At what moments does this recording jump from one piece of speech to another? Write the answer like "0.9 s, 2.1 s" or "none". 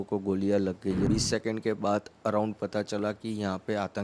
1.1 s